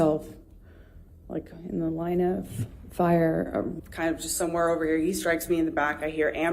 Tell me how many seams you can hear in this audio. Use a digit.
1